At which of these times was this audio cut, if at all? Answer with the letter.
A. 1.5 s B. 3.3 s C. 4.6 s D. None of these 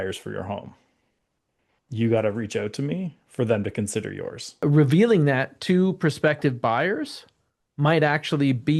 C